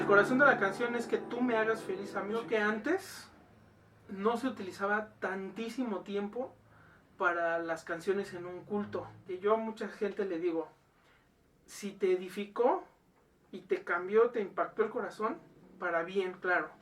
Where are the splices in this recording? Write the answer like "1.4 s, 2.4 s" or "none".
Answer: 2.4 s, 9.2 s, 15.7 s